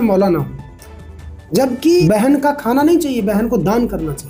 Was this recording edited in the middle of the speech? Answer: yes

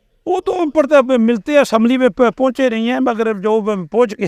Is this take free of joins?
yes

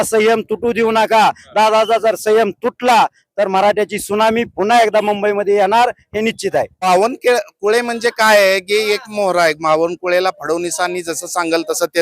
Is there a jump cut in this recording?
yes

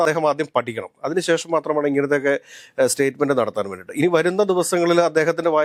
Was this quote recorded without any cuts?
yes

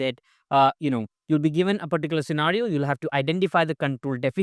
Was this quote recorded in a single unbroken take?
yes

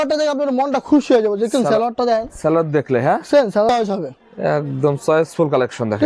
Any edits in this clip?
yes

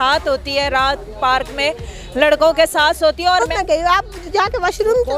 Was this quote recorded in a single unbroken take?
no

